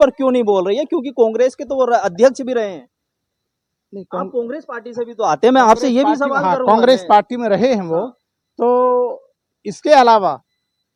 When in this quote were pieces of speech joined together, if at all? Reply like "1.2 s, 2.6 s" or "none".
none